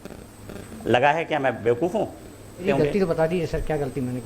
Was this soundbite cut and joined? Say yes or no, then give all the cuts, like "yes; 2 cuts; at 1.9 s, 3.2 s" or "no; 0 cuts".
yes; 1 cut; at 2.6 s